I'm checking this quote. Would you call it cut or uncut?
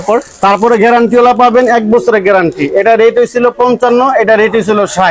uncut